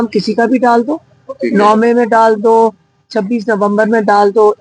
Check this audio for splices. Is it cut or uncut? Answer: uncut